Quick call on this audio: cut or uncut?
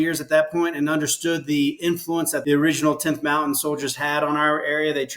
cut